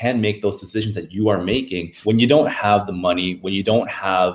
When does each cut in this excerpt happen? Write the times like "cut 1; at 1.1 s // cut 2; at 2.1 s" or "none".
cut 1; at 1.9 s

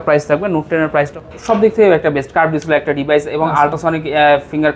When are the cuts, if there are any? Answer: cut 1; at 1.1 s

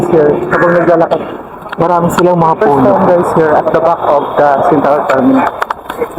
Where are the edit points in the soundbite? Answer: cut 1; at 2.8 s

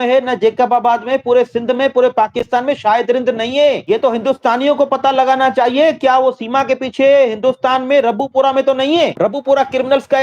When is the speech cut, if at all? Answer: cut 1; at 9.1 s

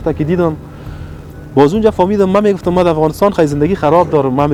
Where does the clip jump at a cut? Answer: none

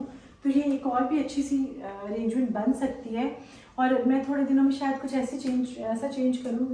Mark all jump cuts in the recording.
none

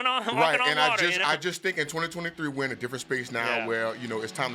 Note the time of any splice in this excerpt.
none

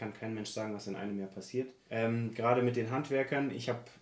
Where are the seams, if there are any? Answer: cut 1; at 1.8 s

